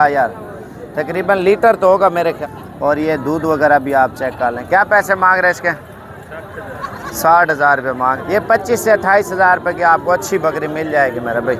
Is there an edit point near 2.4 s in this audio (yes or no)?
yes